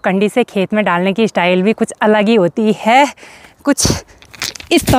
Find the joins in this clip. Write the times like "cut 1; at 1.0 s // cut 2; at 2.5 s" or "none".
none